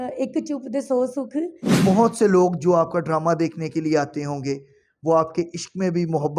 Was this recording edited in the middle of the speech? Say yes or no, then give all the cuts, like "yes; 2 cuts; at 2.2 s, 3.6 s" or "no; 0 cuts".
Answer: yes; 1 cut; at 1.6 s